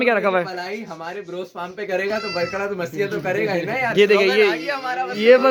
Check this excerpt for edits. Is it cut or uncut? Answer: uncut